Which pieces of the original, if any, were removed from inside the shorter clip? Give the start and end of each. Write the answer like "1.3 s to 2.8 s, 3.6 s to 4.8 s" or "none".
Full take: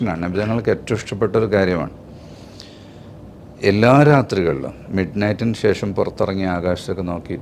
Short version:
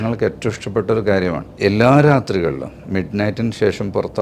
1.9 s to 3.5 s